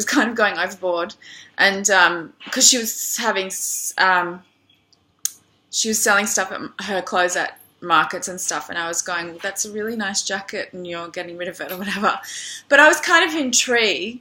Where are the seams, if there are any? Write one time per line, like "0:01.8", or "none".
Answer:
0:01.2